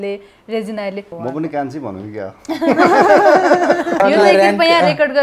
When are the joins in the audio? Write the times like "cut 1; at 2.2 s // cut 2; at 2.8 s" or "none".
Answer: cut 1; at 1.1 s // cut 2; at 4.0 s

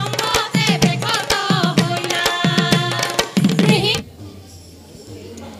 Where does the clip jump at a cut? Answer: cut 1; at 3.9 s

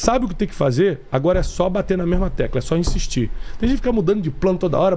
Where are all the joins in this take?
none

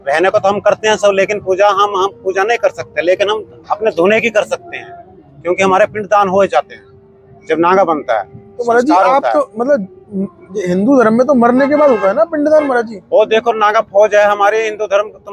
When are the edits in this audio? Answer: none

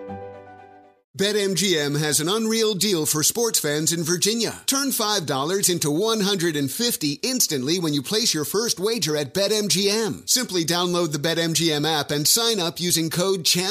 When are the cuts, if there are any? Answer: cut 1; at 0.9 s

